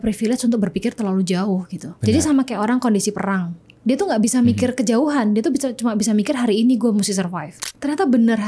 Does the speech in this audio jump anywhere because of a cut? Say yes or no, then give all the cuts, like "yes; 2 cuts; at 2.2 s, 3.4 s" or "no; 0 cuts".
yes; 1 cut; at 7.6 s